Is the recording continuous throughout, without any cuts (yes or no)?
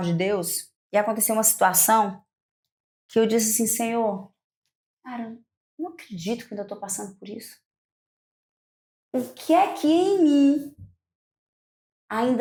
yes